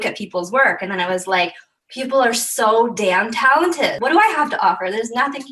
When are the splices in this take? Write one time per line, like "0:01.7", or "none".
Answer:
0:04.0